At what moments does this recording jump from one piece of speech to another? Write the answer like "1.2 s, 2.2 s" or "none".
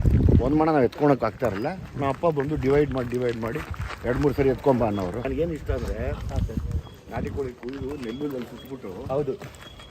5.2 s